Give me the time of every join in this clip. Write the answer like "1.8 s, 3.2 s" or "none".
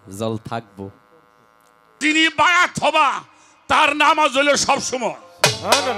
1.9 s